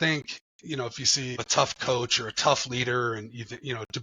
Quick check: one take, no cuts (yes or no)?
no